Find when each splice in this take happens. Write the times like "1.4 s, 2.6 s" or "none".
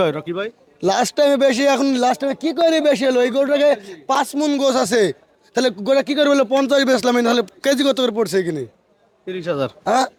none